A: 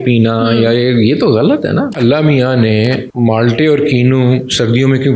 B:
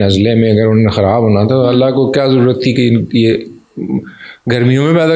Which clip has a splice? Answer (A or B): A